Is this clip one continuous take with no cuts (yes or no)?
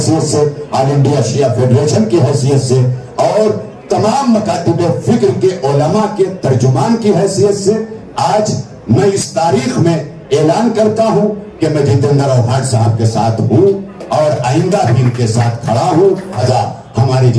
no